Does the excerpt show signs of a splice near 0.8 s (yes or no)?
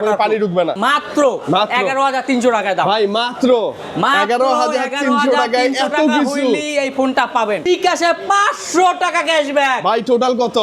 yes